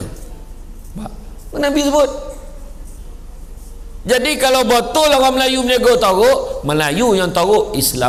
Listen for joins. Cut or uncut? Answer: uncut